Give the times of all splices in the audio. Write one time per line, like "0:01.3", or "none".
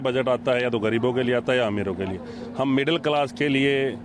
none